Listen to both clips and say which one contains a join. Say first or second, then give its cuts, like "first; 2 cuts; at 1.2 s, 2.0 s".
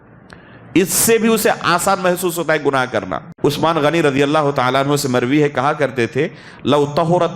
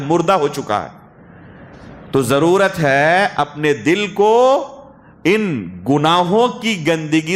first; 1 cut; at 3.2 s